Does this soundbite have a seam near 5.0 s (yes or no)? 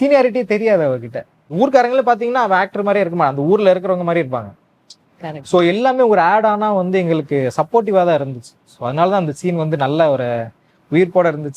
no